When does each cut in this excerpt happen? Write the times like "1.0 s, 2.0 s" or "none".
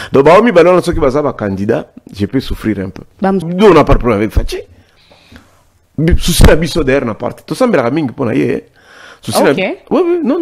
3.4 s